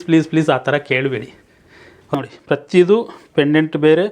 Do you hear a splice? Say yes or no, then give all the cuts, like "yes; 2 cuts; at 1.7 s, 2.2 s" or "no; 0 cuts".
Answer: yes; 1 cut; at 2.1 s